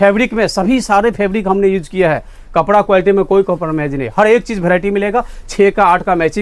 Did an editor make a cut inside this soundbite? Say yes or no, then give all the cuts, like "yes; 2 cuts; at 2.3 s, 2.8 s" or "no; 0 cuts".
no; 0 cuts